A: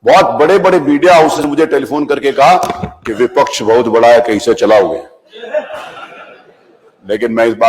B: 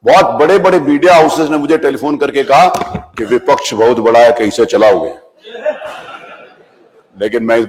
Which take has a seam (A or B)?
A